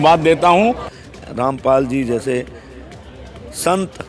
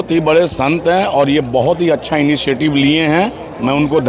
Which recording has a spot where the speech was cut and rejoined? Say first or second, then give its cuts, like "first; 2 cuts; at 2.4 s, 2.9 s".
first; 1 cut; at 0.9 s